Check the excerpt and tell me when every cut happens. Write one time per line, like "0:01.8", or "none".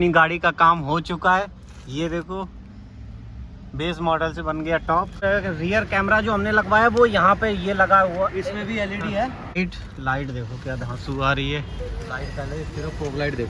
0:05.2
0:09.6